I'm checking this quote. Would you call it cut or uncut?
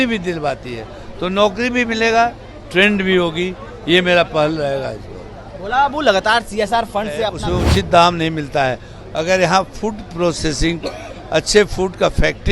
cut